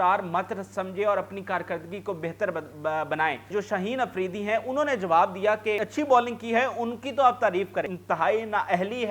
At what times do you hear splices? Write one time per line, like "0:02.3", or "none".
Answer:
0:03.5
0:05.9
0:07.9